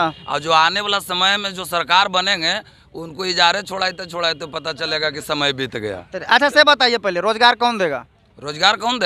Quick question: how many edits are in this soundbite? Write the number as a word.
zero